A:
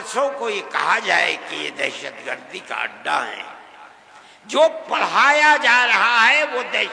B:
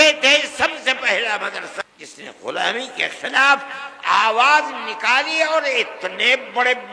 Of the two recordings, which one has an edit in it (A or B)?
B